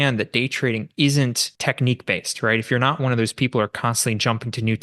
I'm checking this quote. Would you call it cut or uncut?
cut